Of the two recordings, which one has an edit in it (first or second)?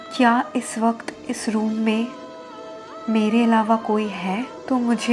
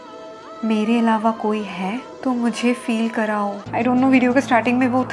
second